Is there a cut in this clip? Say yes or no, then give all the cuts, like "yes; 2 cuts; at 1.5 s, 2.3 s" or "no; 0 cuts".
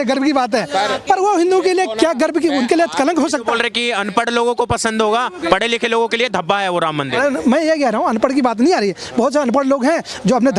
no; 0 cuts